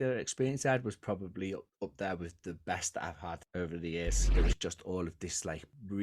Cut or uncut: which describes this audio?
cut